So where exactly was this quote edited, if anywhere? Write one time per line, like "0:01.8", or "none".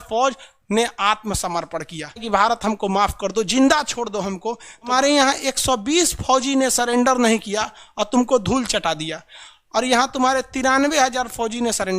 0:02.2
0:04.9